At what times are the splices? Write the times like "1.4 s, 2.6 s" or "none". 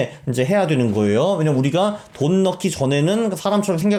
none